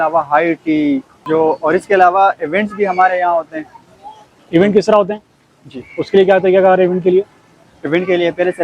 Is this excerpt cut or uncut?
uncut